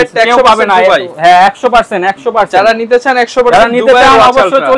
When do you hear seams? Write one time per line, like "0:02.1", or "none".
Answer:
none